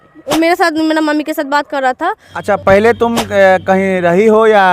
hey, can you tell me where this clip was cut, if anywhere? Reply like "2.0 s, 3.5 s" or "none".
2.4 s